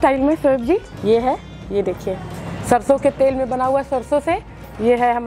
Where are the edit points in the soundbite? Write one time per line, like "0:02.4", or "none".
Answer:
0:00.9